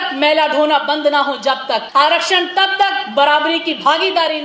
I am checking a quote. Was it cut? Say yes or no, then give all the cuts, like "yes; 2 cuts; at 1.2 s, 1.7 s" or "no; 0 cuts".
no; 0 cuts